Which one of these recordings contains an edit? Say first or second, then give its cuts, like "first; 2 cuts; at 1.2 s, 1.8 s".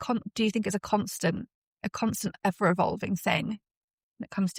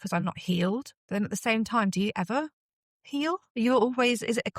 second; 2 cuts; at 1.0 s, 3.5 s